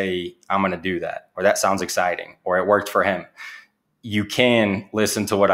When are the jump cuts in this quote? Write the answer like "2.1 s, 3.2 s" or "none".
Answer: none

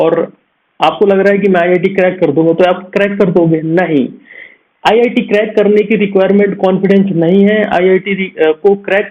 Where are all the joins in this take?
none

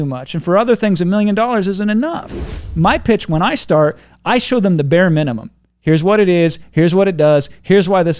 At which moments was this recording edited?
2.6 s

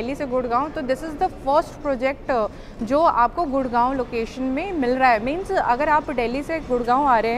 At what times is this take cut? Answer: none

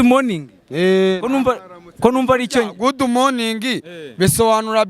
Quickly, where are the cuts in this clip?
none

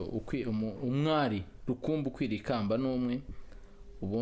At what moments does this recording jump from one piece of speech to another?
none

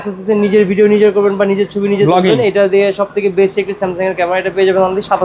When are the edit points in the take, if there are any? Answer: none

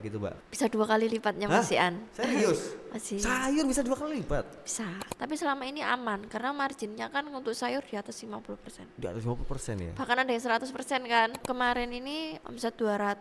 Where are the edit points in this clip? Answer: 5.0 s, 11.4 s

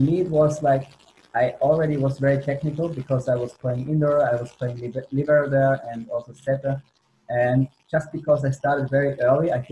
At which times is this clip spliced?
none

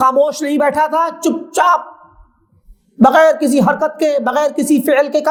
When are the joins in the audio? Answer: none

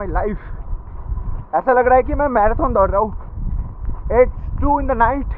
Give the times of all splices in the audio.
none

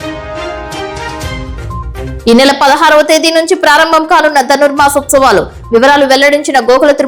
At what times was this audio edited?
none

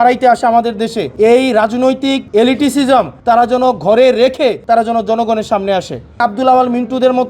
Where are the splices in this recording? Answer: 1.0 s, 2.2 s, 3.1 s, 4.6 s, 6.2 s

